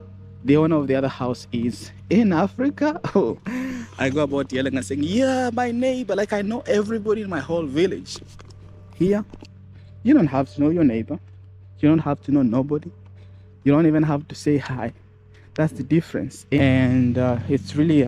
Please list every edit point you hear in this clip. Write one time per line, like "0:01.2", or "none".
0:16.6

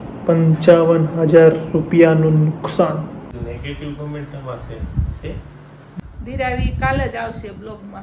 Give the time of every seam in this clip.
0:03.3
0:05.9

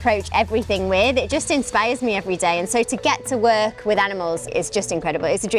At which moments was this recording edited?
0:04.5

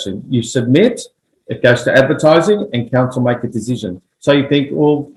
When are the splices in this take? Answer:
none

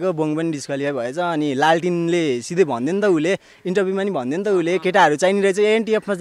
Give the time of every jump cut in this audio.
none

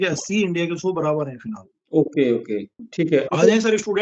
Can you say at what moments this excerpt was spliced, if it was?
none

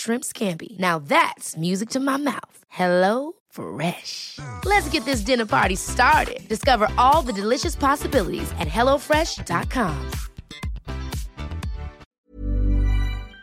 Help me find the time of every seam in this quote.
0:12.1

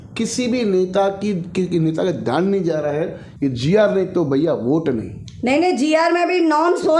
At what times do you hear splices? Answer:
0:03.2

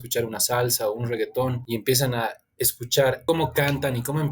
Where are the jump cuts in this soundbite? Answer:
0:01.6
0:03.2

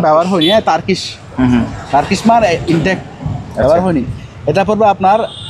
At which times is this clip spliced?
none

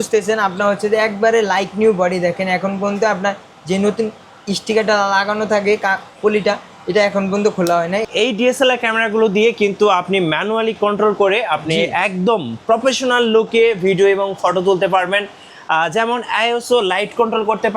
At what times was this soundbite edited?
0:08.1

